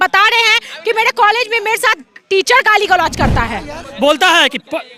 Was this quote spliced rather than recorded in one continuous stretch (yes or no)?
yes